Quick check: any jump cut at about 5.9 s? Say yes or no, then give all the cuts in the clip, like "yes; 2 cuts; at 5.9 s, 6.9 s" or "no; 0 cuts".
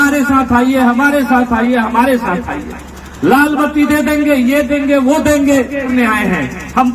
yes; 1 cut; at 5.9 s